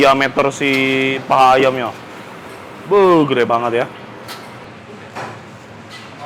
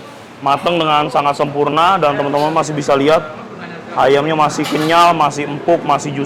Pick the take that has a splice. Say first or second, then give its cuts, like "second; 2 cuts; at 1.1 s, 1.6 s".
first; 1 cut; at 4.6 s